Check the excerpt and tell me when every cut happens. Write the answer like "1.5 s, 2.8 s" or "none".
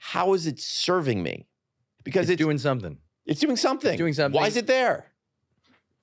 1.9 s